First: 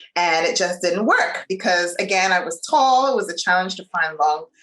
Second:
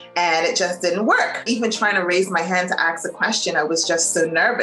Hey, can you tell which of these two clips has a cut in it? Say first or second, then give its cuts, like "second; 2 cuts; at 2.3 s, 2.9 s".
second; 1 cut; at 1.4 s